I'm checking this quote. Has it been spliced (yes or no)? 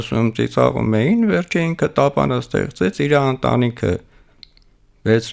no